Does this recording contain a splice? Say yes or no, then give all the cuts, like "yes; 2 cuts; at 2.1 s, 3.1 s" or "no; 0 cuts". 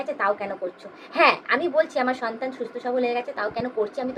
no; 0 cuts